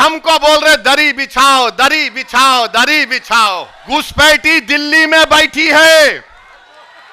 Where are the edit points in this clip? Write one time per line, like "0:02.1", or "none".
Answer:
0:03.7